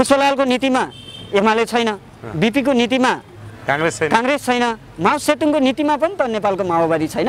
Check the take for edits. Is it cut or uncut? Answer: uncut